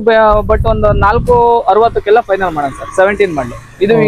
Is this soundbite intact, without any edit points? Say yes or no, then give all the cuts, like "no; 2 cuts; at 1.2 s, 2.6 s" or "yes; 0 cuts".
yes; 0 cuts